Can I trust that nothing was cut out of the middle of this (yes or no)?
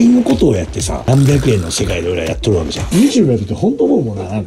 no